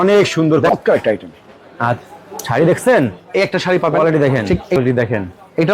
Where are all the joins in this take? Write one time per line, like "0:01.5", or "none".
0:00.7
0:04.8